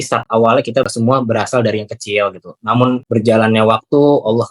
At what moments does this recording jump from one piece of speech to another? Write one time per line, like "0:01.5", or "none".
0:00.9
0:03.0